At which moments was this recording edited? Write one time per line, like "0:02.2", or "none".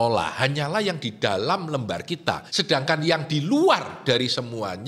0:02.5